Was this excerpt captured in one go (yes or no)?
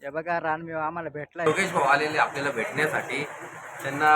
no